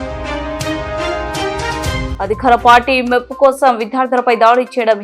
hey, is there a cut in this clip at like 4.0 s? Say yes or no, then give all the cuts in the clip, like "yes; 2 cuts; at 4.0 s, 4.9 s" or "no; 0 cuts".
no; 1 cut; at 2.1 s